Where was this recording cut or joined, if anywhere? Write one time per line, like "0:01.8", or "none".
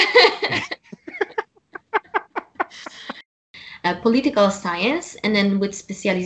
0:03.5